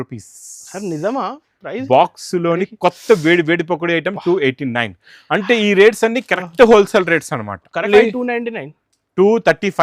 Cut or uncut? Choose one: cut